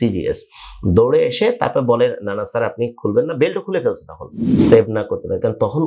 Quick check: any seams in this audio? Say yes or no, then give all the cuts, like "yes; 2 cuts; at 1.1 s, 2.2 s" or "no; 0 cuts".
yes; 1 cut; at 4.6 s